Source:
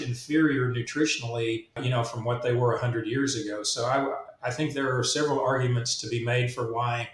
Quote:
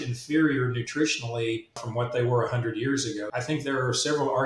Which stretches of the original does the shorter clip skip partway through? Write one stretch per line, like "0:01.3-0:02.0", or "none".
0:01.8-0:02.1
0:03.6-0:04.4